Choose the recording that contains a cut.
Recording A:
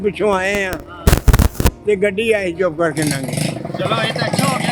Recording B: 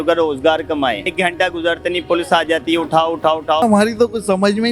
B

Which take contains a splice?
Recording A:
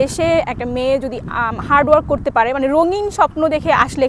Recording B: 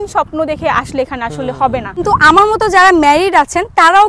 B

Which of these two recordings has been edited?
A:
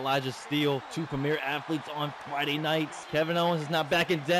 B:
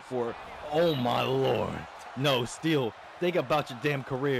A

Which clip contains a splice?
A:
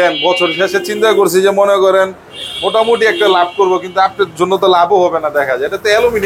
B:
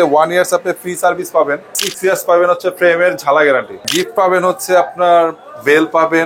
B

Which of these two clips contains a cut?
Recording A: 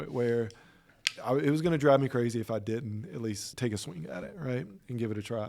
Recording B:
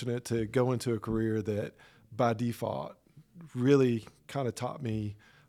A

